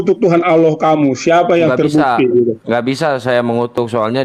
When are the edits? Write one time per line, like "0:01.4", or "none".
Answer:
none